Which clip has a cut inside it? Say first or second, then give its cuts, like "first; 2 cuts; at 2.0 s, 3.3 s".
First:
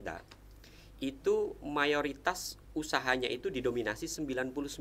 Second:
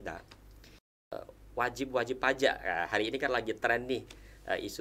second; 1 cut; at 1.1 s